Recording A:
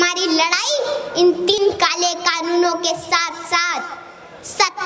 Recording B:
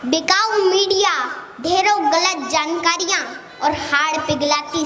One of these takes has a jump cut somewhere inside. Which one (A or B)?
A